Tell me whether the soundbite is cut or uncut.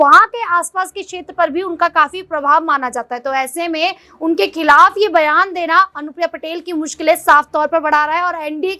uncut